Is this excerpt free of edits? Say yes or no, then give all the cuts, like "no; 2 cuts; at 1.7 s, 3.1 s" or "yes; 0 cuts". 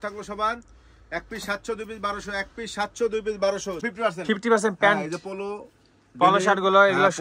no; 1 cut; at 3.8 s